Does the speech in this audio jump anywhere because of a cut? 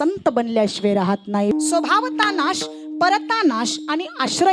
yes; 1 cut; at 1.5 s

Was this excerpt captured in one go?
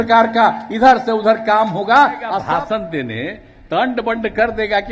no; 1 cut; at 2.4 s

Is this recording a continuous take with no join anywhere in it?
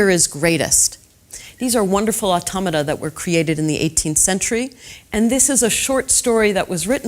no; 1 cut; at 3.4 s

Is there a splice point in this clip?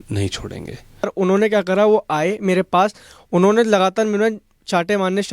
yes; 1 cut; at 1.1 s

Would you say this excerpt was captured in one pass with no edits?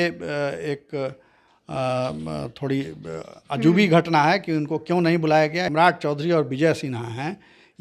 no; 1 cut; at 5.7 s

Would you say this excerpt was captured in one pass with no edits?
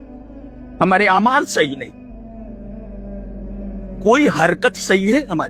yes; 0 cuts

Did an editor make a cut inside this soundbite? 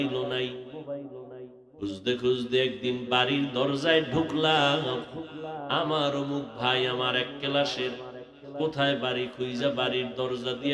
yes; 2 cuts; at 1.7 s, 5.8 s

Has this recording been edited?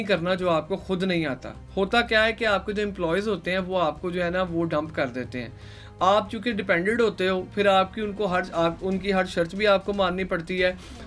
no; 0 cuts

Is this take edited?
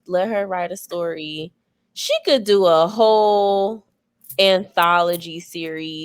no; 0 cuts

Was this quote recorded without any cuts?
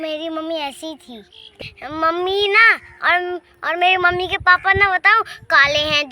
no; 1 cut; at 1.6 s

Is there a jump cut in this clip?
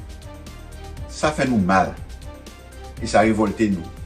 yes; 1 cut; at 1.0 s

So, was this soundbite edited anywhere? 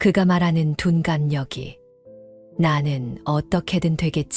no; 0 cuts

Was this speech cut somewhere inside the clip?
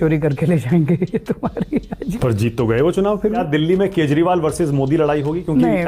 yes; 2 cuts; at 2.0 s, 3.4 s

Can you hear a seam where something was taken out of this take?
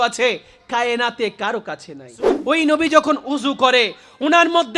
yes; 1 cut; at 2.3 s

